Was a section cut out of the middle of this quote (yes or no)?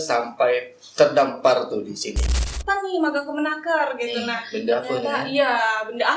yes